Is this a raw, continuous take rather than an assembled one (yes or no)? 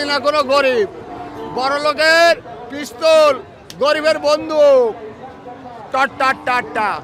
yes